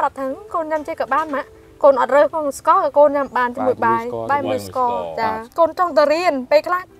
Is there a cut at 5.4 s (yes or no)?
yes